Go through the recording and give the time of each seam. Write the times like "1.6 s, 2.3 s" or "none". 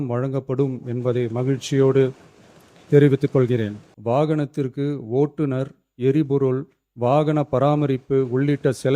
3.9 s